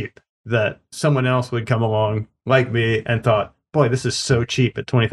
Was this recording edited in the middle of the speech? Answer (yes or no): no